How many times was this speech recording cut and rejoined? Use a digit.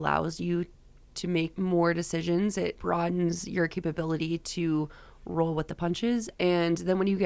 3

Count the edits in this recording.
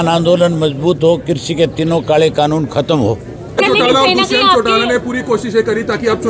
1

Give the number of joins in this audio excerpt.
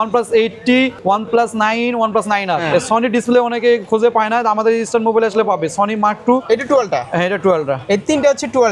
3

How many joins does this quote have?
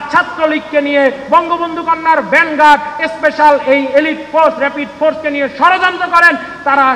0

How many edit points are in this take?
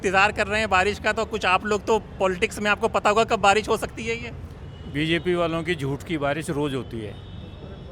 0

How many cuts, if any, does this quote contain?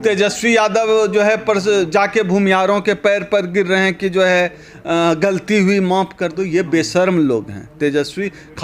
0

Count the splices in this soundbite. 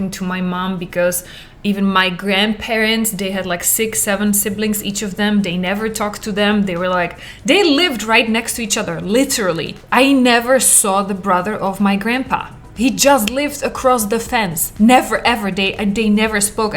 1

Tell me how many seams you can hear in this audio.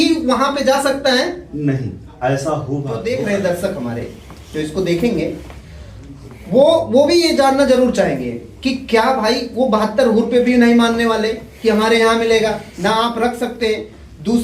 1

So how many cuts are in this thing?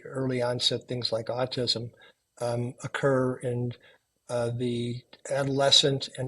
1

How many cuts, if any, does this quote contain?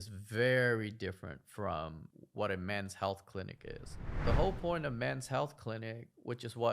1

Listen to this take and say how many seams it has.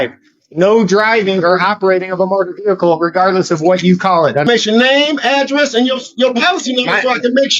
1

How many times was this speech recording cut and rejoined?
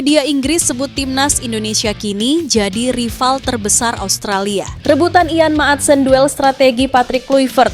1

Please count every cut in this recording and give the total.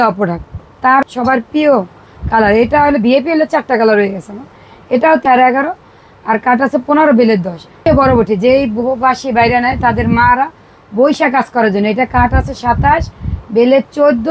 3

